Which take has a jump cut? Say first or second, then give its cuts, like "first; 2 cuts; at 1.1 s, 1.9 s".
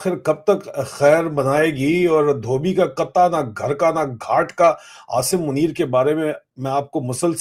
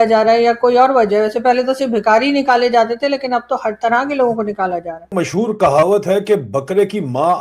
second; 1 cut; at 5.0 s